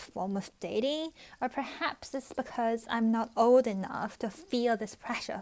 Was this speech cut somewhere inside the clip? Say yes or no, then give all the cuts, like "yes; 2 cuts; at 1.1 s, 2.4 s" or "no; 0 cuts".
no; 0 cuts